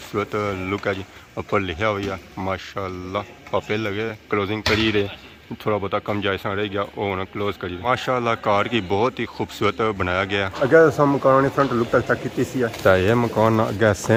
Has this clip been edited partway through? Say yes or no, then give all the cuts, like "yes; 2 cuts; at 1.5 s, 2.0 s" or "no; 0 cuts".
no; 0 cuts